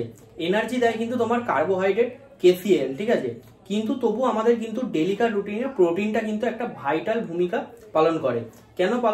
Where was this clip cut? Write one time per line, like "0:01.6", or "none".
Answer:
none